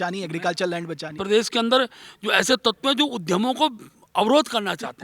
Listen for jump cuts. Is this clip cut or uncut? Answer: cut